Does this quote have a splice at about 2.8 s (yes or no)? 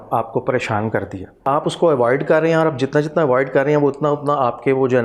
no